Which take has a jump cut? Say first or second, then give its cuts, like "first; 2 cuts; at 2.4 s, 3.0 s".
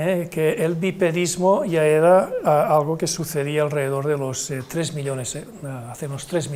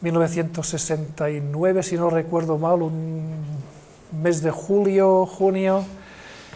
second; 1 cut; at 3.7 s